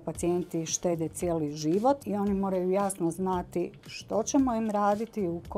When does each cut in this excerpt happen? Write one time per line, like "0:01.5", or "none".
0:02.0